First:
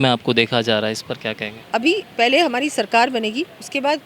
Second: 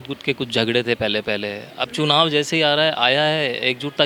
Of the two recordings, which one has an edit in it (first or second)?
first